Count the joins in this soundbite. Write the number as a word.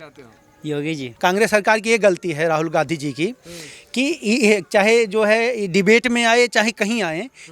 one